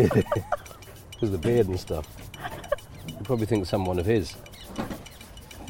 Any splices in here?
no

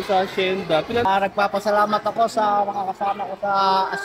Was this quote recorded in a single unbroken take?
no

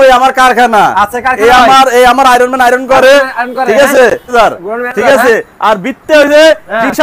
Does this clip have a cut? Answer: yes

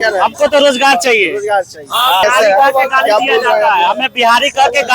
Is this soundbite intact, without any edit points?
no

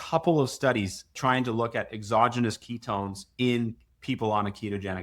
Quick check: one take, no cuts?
no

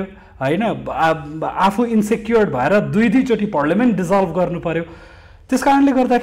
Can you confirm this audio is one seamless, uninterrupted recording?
yes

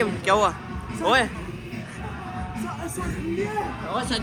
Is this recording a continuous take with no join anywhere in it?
yes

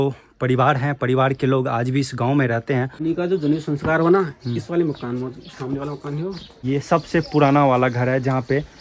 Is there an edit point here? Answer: yes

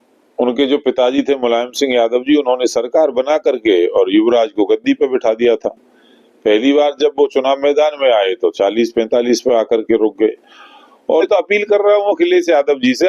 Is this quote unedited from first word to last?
no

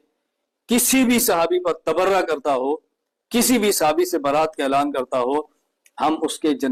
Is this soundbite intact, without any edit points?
yes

